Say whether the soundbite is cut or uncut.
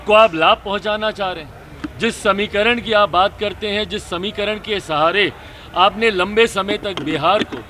uncut